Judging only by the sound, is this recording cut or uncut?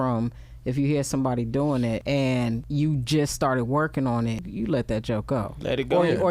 cut